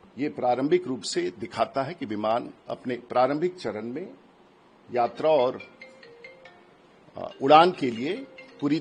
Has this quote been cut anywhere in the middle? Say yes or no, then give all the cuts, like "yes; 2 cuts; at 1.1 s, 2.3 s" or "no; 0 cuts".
no; 0 cuts